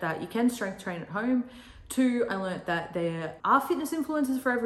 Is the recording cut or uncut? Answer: uncut